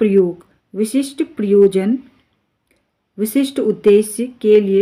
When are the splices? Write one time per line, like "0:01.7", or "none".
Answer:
none